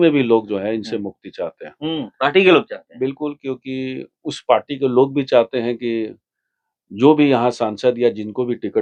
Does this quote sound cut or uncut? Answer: uncut